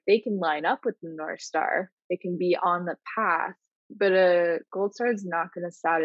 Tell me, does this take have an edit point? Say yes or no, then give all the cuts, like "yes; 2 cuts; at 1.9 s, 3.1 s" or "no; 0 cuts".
no; 0 cuts